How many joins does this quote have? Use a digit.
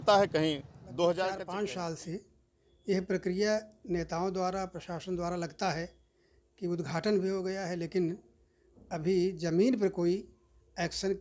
1